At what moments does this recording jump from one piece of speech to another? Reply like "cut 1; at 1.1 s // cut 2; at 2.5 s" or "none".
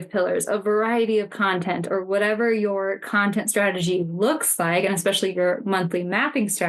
none